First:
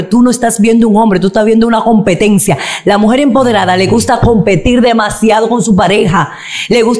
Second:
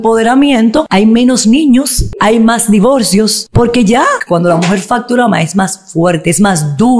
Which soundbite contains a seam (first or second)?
second